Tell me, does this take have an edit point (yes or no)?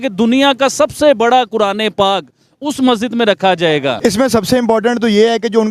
yes